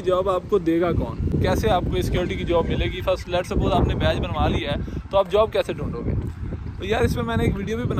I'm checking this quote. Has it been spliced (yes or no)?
no